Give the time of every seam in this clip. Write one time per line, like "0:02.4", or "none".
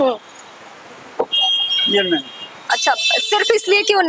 none